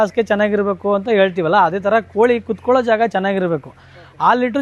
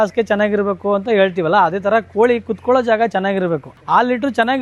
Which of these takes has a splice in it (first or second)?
second